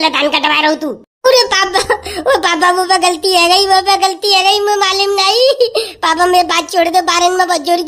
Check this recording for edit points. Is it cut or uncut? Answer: uncut